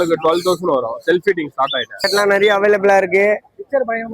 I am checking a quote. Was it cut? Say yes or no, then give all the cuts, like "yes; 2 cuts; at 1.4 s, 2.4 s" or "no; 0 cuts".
yes; 1 cut; at 2.1 s